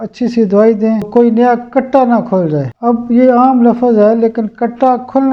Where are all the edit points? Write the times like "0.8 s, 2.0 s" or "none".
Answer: 1.1 s, 2.7 s